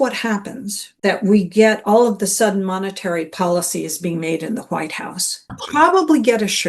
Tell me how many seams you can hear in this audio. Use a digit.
2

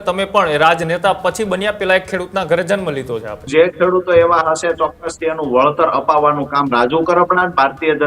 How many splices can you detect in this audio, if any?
1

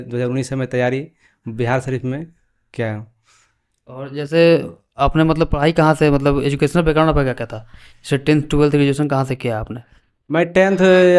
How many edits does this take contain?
0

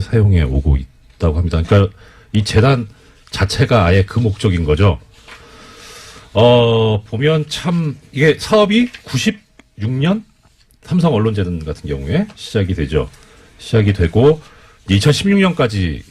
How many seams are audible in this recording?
1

